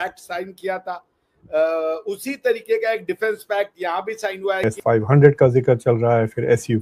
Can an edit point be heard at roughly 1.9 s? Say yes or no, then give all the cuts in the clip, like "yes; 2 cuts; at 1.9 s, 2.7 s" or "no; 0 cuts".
no; 1 cut; at 4.6 s